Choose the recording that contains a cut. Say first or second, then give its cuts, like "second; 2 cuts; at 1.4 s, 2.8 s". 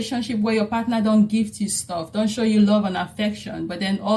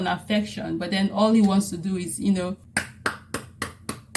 second; 1 cut; at 2.6 s